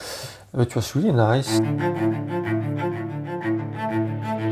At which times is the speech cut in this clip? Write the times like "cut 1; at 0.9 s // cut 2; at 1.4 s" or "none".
cut 1; at 1.5 s